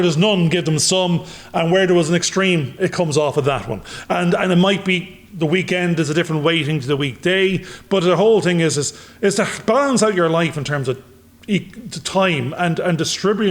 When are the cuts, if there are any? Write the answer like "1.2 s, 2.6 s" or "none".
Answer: none